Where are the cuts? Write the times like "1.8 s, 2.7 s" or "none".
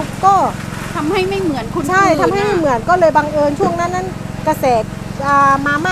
none